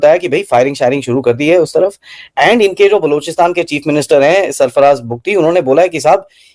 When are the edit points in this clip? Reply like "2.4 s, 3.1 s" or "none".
none